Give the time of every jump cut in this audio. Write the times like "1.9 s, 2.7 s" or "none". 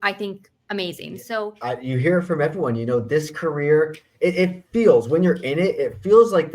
1.5 s